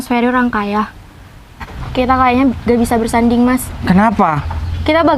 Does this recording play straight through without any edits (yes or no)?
no